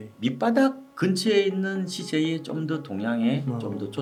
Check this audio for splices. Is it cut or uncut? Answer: uncut